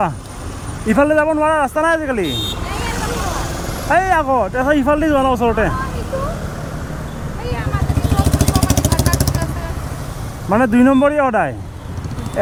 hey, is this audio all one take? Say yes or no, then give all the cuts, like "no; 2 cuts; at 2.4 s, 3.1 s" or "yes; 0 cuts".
yes; 0 cuts